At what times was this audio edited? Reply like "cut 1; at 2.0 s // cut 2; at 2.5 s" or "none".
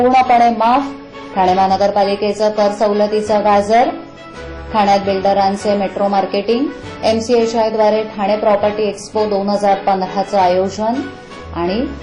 none